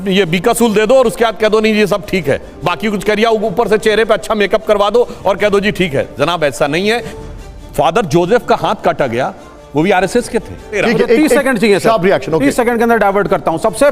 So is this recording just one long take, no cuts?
yes; 0 cuts

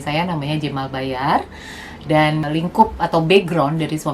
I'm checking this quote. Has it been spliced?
yes; 1 cut; at 2.4 s

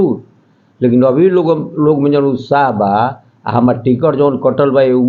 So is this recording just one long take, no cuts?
yes; 0 cuts

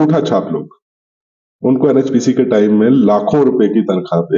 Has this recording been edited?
no; 0 cuts

